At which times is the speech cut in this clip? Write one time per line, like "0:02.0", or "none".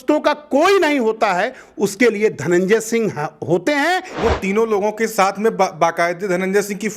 0:04.1